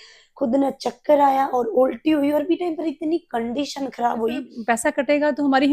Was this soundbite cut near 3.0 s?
no; 1 cut; at 4.5 s

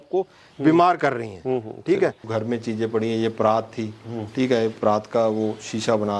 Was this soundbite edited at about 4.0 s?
no; 1 cut; at 2.3 s

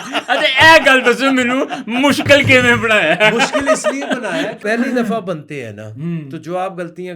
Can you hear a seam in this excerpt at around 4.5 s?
yes; 1 cut; at 4.5 s

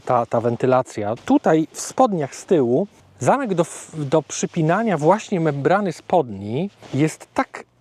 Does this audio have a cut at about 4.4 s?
no; 3 cuts; at 1.1 s, 3.0 s, 6.8 s

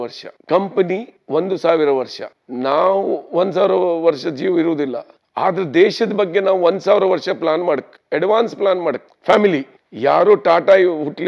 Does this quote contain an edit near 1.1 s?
yes; 1 cut; at 1.1 s

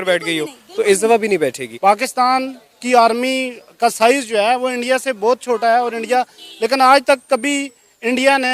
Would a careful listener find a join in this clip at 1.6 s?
yes; 1 cut; at 1.6 s

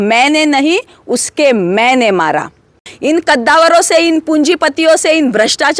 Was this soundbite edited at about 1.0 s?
no; 1 cut; at 2.9 s

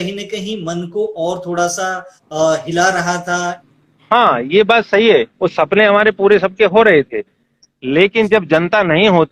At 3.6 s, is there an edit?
yes; 2 cuts; at 3.6 s, 5.3 s

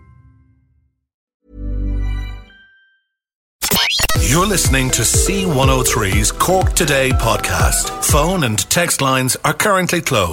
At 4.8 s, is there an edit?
no; 2 cuts; at 1.3 s, 3.5 s

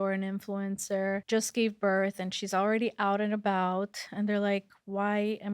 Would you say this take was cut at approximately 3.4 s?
no; 1 cut; at 1.2 s

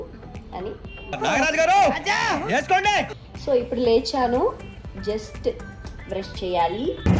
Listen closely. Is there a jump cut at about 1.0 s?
yes; 2 cuts; at 1.0 s, 3.1 s

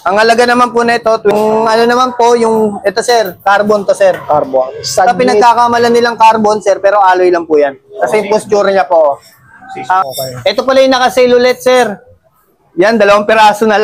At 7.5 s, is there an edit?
no; 2 cuts; at 1.3 s, 10.0 s

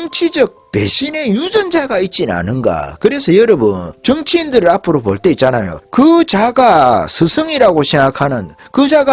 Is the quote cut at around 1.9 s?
no; 2 cuts; at 3.9 s, 5.7 s

